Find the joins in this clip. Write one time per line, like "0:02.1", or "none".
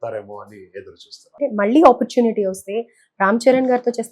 0:01.2